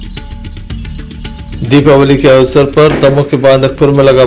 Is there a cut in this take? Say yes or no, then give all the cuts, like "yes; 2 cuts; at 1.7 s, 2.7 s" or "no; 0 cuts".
yes; 1 cut; at 1.5 s